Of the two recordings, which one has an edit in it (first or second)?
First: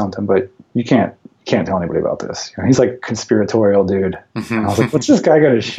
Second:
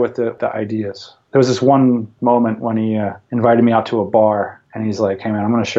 second